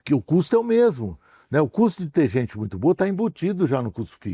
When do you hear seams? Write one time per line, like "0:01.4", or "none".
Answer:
none

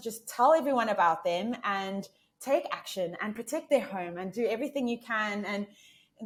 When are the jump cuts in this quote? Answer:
none

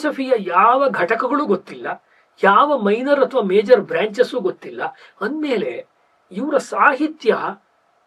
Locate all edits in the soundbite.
none

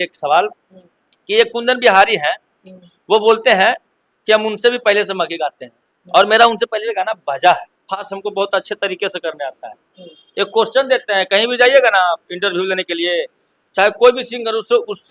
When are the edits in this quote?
0:08.1

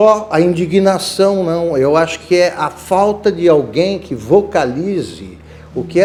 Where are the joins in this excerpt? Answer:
none

